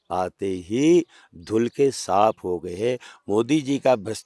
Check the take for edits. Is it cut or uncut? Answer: uncut